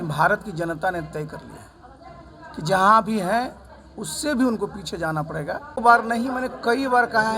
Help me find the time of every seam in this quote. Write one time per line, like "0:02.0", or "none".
0:05.7